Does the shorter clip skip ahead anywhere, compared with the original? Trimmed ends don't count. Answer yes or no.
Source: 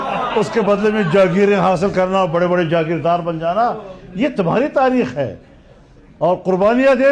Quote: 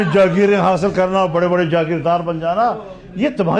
no